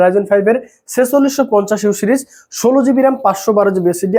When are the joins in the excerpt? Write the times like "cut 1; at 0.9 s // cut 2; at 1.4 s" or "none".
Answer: none